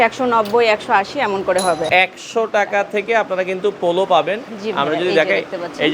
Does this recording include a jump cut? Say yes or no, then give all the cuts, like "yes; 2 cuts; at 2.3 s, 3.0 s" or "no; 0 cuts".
yes; 1 cut; at 1.8 s